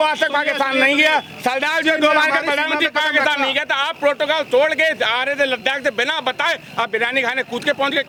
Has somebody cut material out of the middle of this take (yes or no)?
no